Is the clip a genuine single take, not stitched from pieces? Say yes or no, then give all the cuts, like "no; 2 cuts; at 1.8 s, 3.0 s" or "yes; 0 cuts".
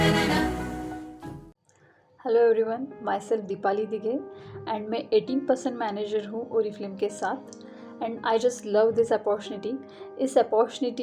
no; 1 cut; at 1.5 s